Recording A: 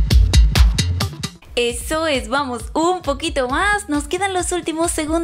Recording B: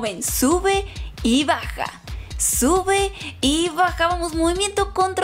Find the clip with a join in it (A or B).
A